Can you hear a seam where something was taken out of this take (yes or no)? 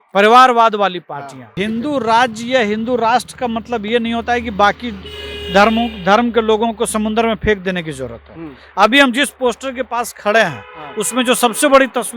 yes